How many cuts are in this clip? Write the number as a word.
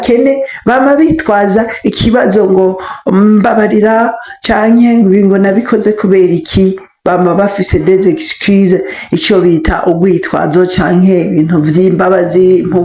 zero